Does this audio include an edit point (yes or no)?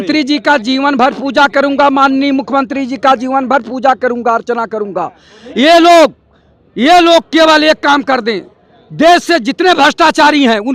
no